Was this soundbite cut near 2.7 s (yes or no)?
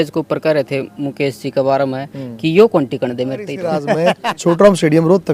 no